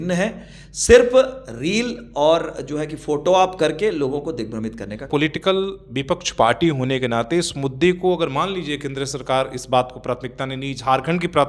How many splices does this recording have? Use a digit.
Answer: 0